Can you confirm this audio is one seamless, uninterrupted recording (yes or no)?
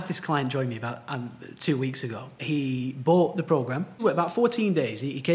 no